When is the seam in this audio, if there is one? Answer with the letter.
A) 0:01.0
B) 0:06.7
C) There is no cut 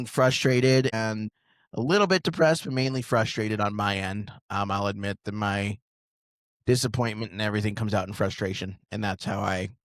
A